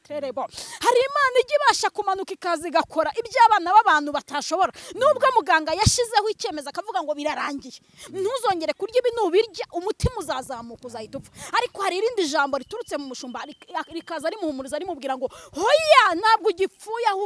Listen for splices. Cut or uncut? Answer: uncut